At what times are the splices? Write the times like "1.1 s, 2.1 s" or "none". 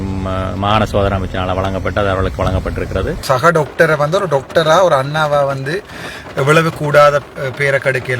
3.2 s

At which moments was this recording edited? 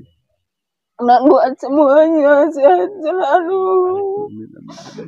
none

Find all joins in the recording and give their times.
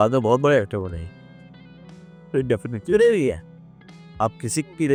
none

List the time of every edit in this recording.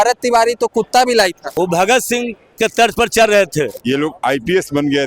1.4 s, 3.8 s

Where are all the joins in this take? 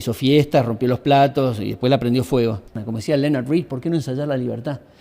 2.8 s

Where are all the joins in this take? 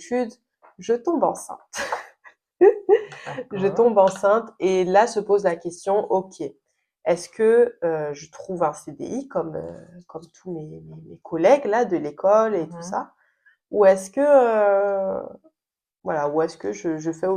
none

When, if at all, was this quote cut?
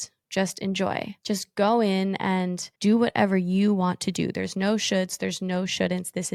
none

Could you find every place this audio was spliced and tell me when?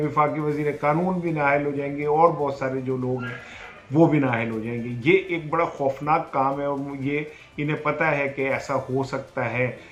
none

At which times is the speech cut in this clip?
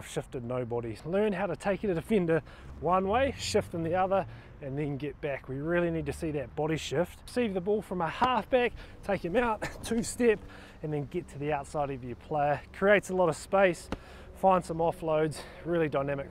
0.9 s, 7.3 s

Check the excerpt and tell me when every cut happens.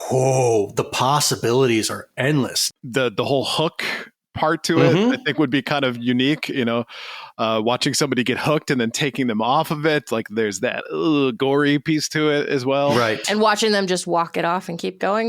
2.6 s

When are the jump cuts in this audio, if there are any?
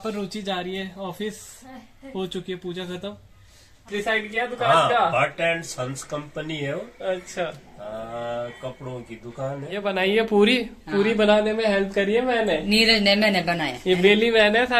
3.9 s, 9.7 s

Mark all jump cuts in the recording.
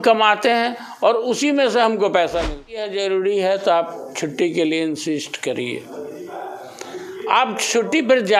2.9 s

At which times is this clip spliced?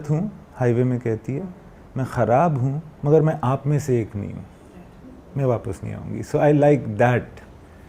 none

